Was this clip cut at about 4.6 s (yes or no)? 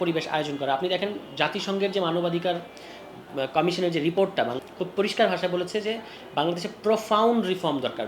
yes